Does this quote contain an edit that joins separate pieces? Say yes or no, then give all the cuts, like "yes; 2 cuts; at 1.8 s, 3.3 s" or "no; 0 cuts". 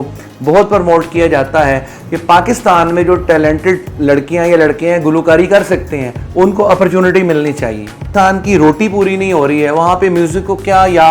yes; 2 cuts; at 1.9 s, 8.1 s